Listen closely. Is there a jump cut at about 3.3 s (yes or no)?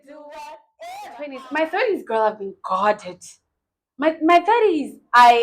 no